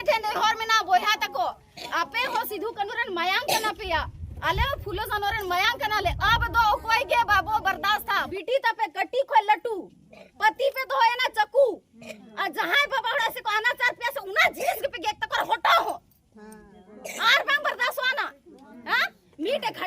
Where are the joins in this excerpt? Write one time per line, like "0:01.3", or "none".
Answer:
0:08.3